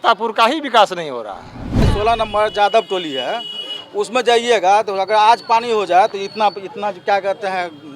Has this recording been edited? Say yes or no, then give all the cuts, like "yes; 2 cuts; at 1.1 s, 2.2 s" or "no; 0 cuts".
yes; 1 cut; at 1.9 s